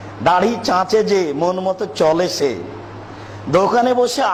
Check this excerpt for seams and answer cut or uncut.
uncut